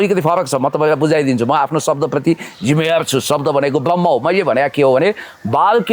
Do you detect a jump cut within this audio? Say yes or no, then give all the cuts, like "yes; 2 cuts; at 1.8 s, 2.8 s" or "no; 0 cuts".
no; 0 cuts